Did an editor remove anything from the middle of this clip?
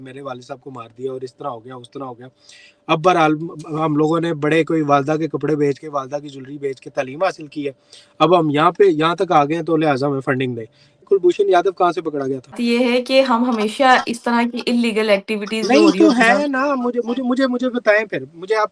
yes; 2 cuts; at 11.0 s, 12.6 s

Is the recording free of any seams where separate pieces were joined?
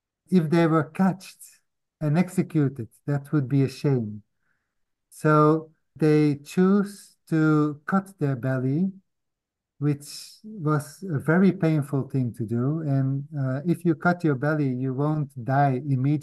yes; 0 cuts

